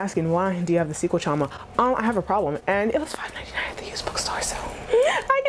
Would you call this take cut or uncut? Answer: uncut